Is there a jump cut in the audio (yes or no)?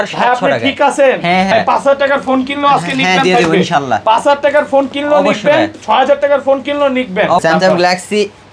yes